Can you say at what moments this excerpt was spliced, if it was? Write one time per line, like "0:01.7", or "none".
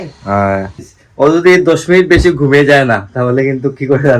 0:01.0